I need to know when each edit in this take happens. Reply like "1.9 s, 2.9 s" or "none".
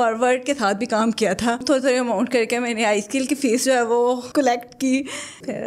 1.6 s